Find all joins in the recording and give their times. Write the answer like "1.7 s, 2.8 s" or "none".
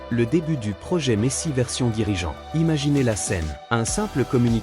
2.4 s, 3.5 s